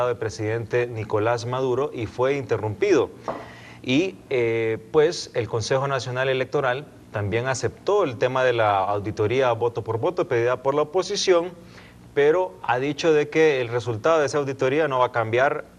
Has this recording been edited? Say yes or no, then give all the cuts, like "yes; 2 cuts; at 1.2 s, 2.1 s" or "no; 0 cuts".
no; 0 cuts